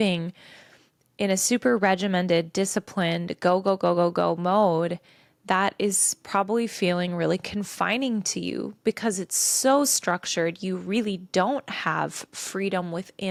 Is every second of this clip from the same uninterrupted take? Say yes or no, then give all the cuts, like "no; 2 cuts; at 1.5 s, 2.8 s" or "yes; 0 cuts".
yes; 0 cuts